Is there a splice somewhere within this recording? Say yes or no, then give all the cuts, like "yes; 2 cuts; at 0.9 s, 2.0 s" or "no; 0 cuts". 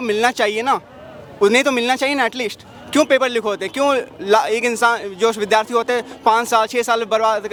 no; 0 cuts